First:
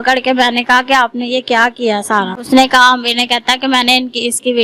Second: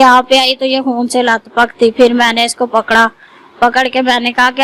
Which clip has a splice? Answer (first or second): first